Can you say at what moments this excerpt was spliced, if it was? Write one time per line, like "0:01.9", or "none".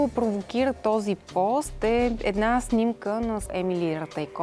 0:03.5